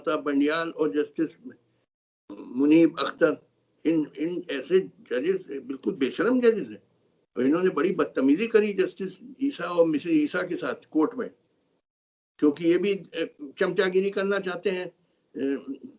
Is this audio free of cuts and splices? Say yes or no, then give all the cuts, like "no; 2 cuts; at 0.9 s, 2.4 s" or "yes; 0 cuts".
yes; 0 cuts